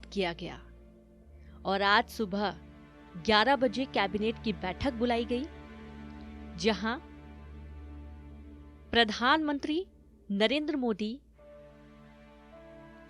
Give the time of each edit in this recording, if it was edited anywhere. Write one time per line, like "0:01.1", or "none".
0:07.0
0:08.9